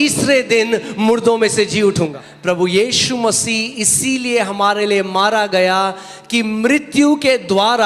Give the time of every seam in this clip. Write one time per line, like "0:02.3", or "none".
0:02.3